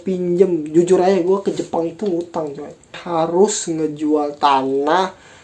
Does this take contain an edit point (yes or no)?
yes